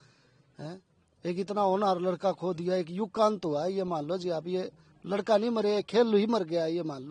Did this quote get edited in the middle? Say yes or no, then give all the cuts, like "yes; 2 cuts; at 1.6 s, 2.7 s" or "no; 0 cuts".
no; 0 cuts